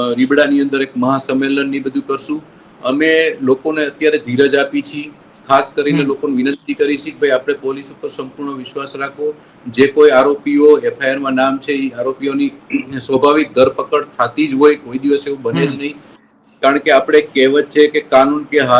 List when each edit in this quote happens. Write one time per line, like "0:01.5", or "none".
none